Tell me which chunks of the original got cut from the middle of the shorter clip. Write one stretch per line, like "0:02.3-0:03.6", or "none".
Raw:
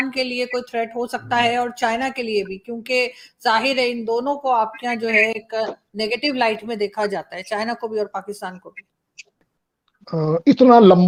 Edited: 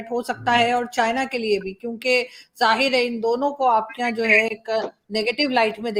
none